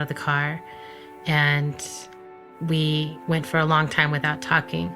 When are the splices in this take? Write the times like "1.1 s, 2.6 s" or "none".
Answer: 2.4 s